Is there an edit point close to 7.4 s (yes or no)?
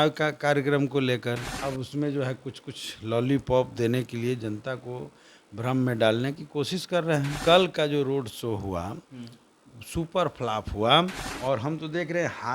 yes